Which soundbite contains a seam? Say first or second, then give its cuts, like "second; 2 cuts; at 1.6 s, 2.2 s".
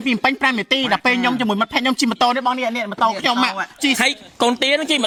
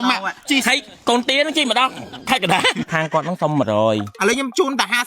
second; 2 cuts; at 2.8 s, 4.1 s